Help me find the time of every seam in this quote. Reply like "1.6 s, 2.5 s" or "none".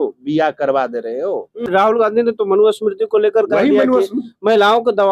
1.7 s